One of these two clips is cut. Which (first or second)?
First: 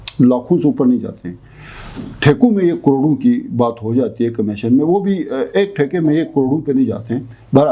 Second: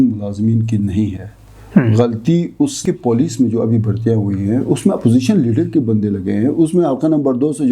second